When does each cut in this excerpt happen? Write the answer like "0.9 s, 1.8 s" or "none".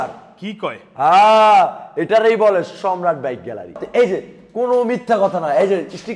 3.8 s